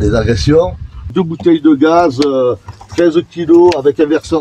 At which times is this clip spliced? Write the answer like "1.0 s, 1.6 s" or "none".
1.1 s